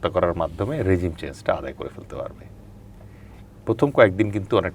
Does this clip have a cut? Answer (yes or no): no